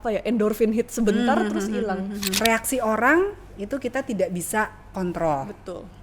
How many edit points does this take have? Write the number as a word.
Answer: one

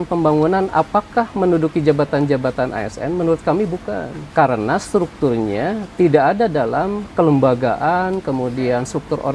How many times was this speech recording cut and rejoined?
two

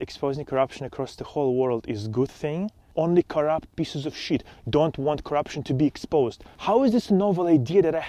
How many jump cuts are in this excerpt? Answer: two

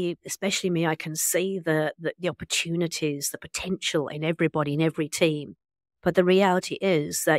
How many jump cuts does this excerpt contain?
zero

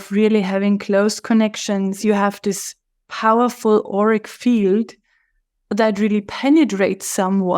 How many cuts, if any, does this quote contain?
one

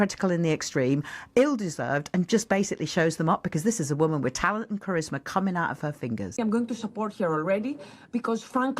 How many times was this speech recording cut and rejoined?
one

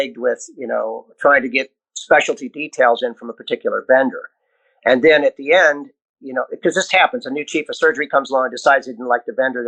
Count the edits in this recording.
zero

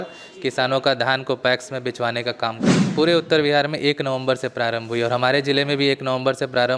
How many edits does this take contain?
one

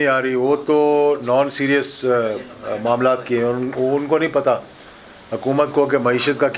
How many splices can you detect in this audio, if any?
zero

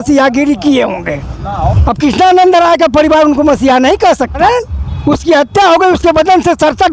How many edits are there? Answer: two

